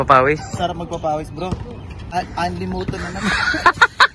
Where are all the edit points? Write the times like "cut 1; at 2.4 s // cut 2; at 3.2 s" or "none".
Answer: cut 1; at 2.0 s